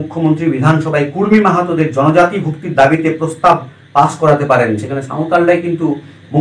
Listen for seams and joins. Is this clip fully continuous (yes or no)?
yes